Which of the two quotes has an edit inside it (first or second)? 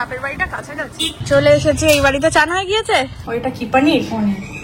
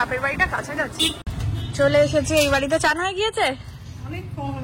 first